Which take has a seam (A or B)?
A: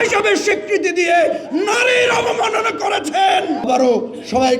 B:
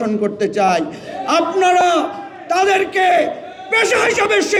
A